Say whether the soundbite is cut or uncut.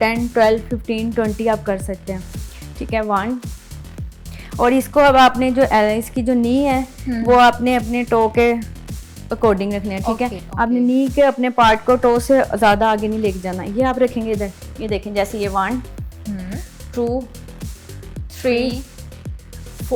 uncut